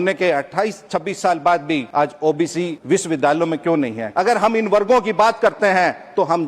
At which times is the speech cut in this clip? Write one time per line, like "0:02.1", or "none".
0:01.9
0:02.8
0:04.0